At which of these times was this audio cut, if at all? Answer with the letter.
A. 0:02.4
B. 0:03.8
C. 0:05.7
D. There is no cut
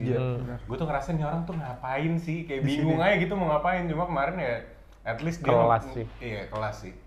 D